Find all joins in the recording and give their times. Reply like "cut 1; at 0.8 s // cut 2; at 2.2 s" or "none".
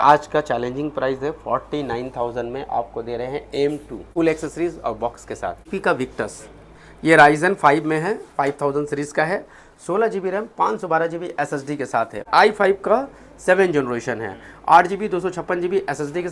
cut 1; at 4.0 s // cut 2; at 5.7 s // cut 3; at 12.2 s